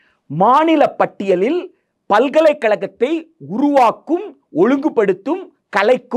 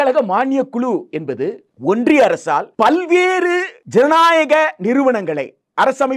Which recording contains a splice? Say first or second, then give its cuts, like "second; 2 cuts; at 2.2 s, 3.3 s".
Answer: second; 3 cuts; at 1.7 s, 2.7 s, 3.8 s